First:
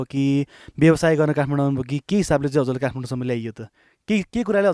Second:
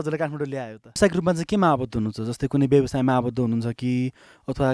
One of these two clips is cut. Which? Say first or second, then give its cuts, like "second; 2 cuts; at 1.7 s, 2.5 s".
second; 1 cut; at 1.0 s